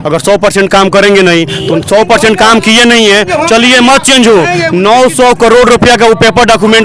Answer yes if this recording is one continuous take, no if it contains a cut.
yes